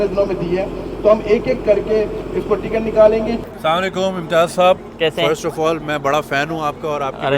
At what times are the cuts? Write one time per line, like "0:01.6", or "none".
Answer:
0:03.4